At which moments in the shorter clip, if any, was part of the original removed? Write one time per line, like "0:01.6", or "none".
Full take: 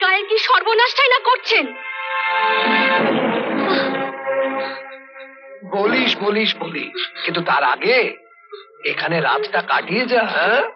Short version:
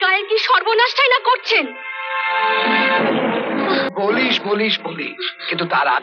0:03.9